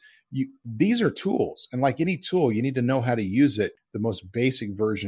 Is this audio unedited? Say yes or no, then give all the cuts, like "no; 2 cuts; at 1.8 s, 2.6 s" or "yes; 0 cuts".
no; 1 cut; at 3.8 s